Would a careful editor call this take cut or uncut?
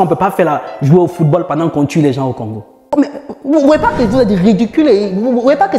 cut